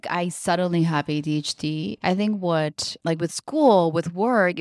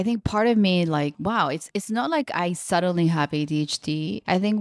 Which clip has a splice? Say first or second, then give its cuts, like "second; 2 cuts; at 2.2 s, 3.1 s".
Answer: second; 1 cut; at 1.2 s